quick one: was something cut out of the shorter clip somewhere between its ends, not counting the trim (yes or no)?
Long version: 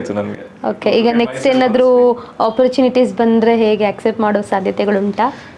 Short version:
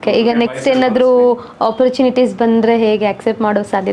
no